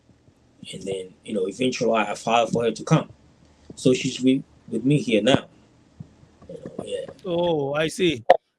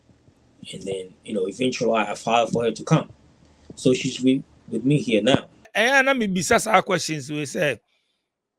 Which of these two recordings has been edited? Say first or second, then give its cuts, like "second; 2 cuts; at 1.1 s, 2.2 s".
second; 1 cut; at 5.7 s